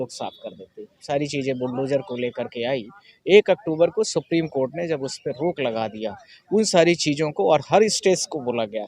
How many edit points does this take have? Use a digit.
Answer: 1